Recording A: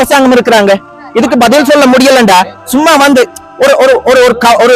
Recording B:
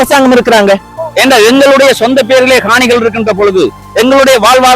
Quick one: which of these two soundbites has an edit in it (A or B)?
B